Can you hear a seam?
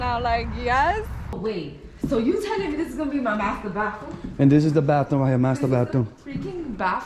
yes; 1 cut; at 1.3 s

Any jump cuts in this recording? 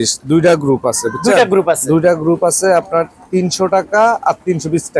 no; 0 cuts

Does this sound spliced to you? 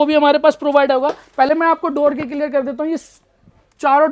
no; 0 cuts

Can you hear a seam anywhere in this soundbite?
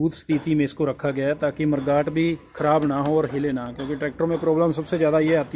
no; 0 cuts

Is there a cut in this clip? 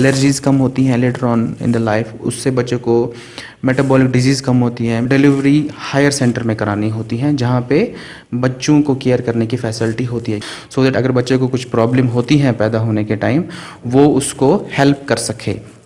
yes; 2 cuts; at 5.0 s, 10.4 s

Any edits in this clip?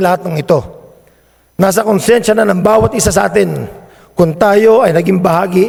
no; 0 cuts

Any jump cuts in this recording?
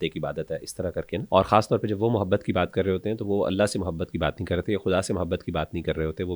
yes; 1 cut; at 1.2 s

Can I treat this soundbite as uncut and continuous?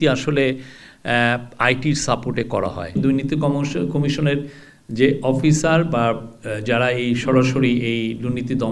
no; 1 cut; at 3.0 s

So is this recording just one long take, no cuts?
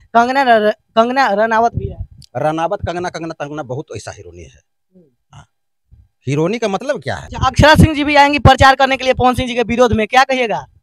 no; 1 cut; at 7.3 s

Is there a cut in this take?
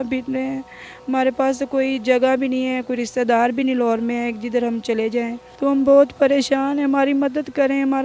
yes; 1 cut; at 5.4 s

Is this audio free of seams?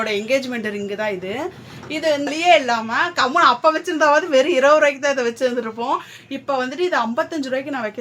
no; 1 cut; at 2.3 s

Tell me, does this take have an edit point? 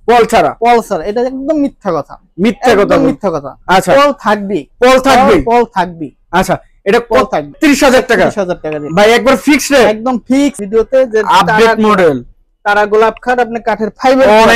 yes; 2 cuts; at 7.5 s, 10.6 s

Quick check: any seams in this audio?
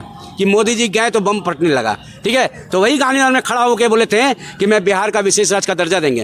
no; 0 cuts

